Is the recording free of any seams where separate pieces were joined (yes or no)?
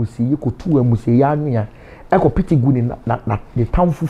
yes